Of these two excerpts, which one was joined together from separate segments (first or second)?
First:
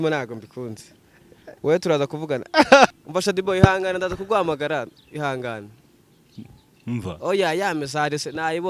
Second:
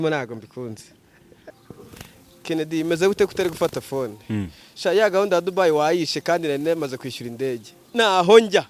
second